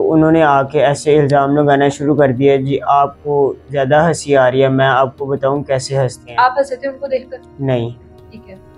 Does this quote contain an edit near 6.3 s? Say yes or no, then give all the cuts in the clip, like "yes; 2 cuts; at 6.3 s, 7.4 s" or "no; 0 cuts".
no; 0 cuts